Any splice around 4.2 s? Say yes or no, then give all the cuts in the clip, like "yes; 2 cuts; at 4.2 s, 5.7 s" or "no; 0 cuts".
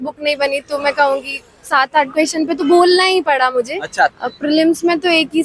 yes; 1 cut; at 4.2 s